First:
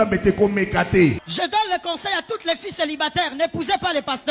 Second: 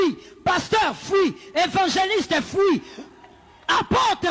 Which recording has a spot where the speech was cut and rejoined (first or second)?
first